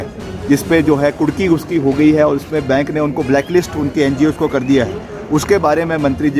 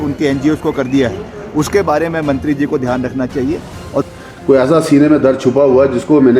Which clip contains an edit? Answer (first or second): second